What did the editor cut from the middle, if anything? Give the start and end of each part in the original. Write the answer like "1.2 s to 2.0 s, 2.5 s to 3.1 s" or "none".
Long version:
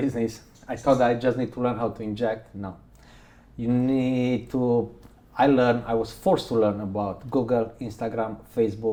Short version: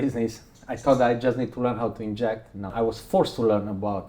2.7 s to 5.8 s